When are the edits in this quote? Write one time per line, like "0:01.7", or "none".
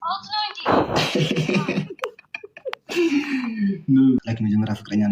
0:04.2